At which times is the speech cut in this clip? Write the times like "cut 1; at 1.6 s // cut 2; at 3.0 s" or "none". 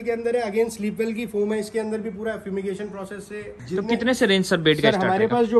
cut 1; at 3.6 s